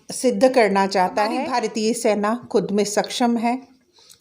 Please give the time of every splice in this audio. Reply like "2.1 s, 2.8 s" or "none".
1.5 s